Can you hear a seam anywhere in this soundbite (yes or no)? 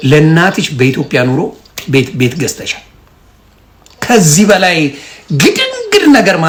no